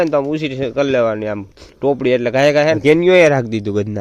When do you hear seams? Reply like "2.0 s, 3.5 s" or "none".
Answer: 2.8 s